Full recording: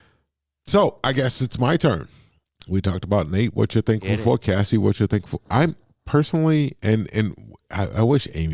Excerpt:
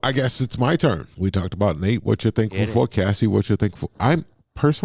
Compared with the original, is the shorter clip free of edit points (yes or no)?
no